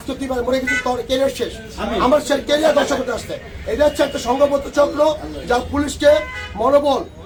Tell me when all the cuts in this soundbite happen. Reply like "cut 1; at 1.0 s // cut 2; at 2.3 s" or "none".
none